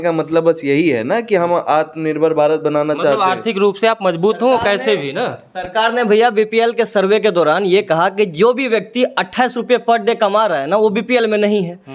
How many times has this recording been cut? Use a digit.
0